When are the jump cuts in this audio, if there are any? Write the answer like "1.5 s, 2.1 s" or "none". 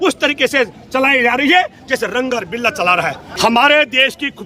3.3 s